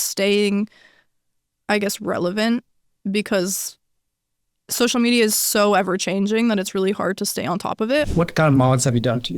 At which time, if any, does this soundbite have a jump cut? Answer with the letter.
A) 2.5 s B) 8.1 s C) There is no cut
B